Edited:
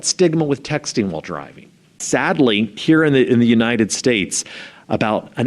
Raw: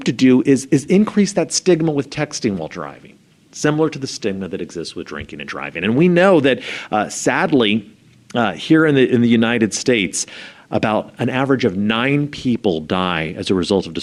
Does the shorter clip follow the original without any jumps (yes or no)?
no